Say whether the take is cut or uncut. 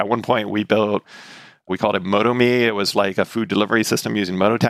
uncut